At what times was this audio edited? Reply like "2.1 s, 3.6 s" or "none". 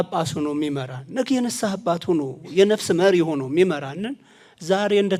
none

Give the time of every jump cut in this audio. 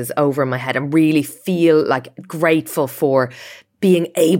none

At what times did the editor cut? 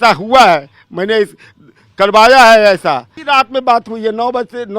3.1 s

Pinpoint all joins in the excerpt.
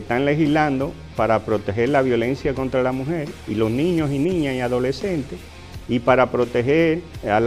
none

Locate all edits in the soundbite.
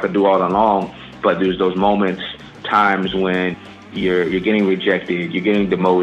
1.1 s, 2.6 s, 3.8 s

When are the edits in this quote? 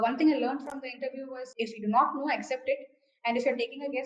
1.4 s

